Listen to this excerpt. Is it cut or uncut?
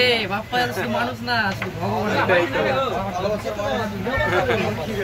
uncut